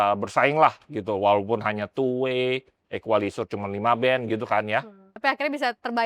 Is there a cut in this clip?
yes; 1 cut; at 5.1 s

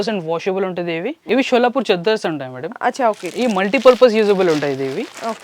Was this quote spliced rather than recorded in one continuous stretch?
yes; 1 cut; at 1.2 s

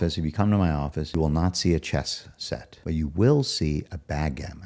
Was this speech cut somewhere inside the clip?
yes; 2 cuts; at 1.1 s, 2.7 s

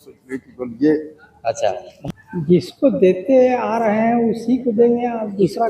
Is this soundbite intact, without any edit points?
no; 1 cut; at 1.9 s

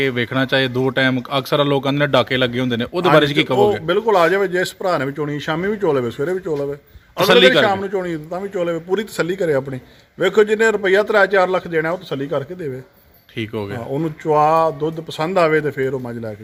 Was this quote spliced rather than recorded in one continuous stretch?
no; 0 cuts

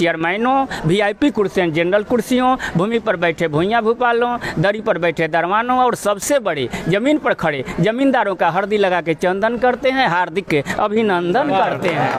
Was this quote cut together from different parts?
no; 0 cuts

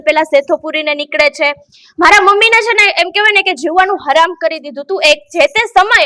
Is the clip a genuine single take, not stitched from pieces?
yes; 0 cuts

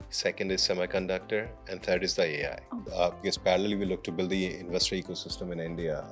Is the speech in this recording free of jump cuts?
no; 1 cut; at 2.8 s

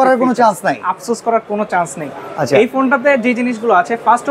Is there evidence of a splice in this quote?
no; 0 cuts

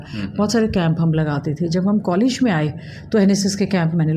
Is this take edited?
no; 0 cuts

